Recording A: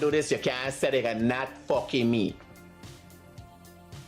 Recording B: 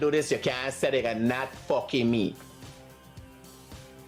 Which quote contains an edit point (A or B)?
A